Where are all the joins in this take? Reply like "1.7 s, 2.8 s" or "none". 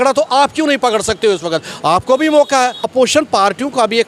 2.8 s